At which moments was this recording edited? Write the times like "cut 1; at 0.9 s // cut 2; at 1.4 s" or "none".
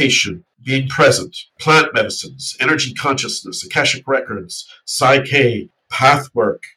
cut 1; at 1.6 s